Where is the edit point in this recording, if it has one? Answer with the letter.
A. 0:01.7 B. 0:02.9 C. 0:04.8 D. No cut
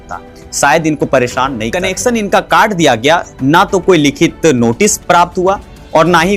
A